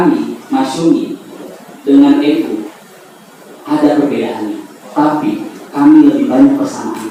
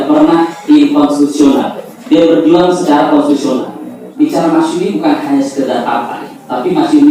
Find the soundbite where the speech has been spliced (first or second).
second